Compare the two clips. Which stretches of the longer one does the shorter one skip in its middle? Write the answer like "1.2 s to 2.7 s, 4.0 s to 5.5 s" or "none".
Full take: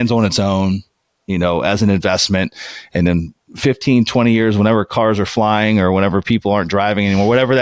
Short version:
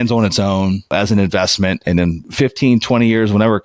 0.9 s to 1.6 s, 2.8 s to 3.3 s